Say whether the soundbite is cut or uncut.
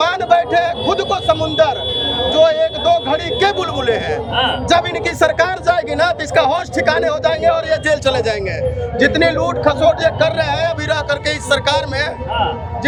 uncut